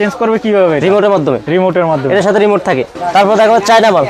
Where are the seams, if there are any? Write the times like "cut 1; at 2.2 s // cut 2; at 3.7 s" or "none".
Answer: cut 1; at 3.0 s